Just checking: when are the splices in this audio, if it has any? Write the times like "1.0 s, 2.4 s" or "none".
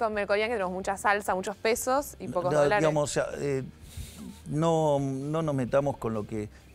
none